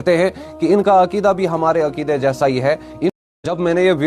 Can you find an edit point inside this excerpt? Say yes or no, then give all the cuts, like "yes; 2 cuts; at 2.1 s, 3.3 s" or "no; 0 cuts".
yes; 1 cut; at 3.1 s